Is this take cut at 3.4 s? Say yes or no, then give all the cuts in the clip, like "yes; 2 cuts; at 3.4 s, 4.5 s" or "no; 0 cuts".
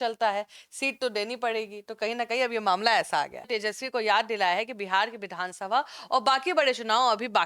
yes; 1 cut; at 3.4 s